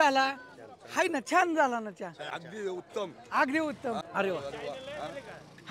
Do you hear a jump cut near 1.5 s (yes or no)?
no